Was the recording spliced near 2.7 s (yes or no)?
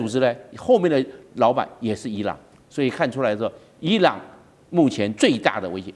no